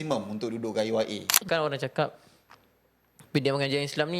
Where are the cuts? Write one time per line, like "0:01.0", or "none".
0:01.4